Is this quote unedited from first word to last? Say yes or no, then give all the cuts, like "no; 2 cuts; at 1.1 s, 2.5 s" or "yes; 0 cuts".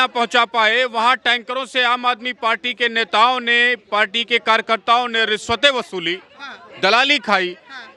yes; 0 cuts